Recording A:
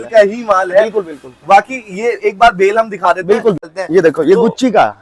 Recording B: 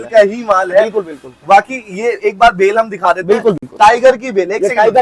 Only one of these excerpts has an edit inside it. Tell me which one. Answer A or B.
A